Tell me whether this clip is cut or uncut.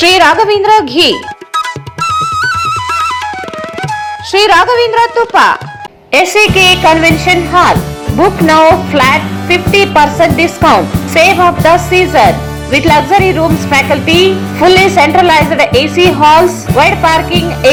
uncut